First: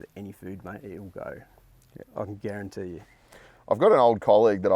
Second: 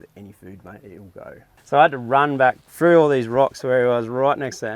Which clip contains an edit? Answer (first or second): second